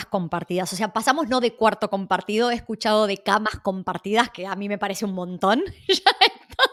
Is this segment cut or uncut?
uncut